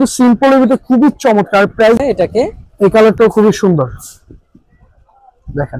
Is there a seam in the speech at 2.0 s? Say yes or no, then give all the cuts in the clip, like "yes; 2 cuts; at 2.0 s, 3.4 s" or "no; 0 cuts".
yes; 1 cut; at 2.0 s